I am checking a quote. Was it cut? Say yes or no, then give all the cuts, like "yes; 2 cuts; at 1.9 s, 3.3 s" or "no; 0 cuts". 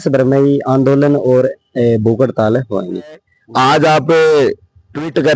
yes; 1 cut; at 3.3 s